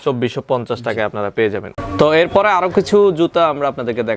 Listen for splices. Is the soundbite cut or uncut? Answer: uncut